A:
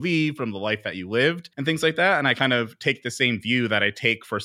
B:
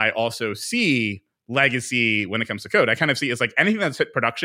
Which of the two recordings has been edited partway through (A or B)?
A